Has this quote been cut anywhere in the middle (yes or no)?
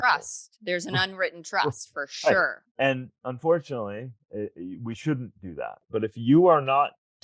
yes